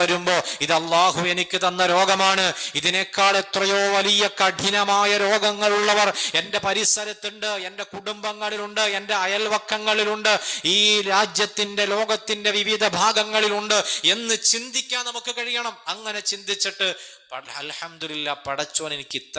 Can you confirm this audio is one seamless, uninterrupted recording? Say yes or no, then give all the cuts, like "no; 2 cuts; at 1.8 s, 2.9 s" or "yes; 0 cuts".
yes; 0 cuts